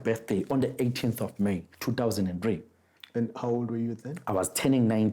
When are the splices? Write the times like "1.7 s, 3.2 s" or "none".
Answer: none

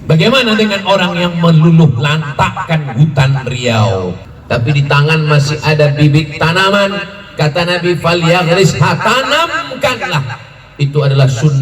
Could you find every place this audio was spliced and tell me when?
4.3 s

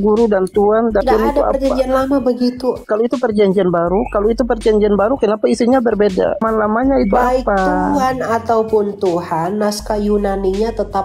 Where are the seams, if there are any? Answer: 1.0 s, 2.8 s, 6.4 s

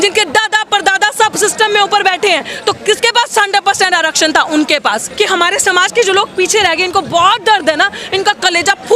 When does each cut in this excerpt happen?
5.1 s

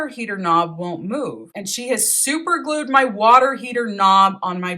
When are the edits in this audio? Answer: 1.5 s

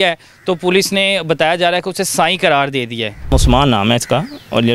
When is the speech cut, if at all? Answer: 3.3 s

